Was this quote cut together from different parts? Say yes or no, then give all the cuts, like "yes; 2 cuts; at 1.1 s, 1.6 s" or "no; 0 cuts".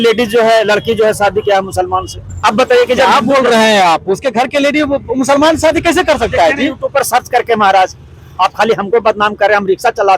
no; 0 cuts